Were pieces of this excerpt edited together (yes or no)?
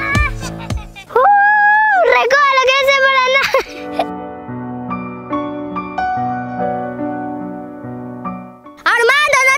yes